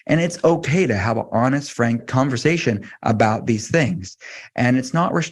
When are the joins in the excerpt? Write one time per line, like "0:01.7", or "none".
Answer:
0:02.1